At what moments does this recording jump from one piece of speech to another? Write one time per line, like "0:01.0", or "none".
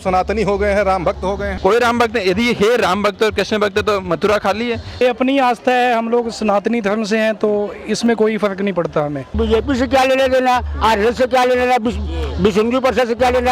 0:01.5
0:05.0
0:09.4